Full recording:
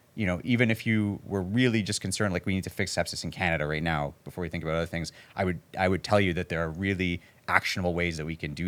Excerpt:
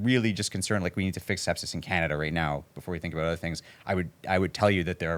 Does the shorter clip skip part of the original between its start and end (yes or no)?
no